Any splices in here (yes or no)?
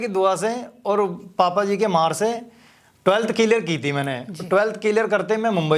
no